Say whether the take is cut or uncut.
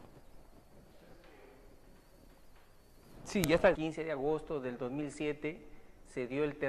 uncut